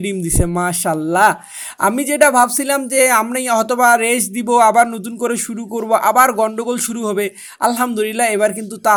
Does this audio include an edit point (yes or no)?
no